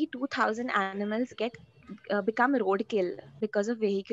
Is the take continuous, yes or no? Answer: yes